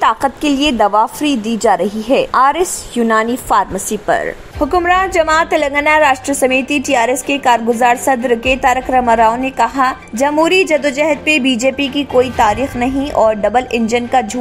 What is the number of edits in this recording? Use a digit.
1